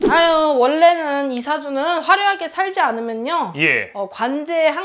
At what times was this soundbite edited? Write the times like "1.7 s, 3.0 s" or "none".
none